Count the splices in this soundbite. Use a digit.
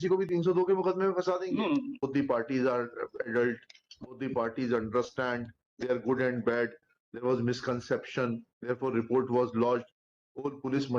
1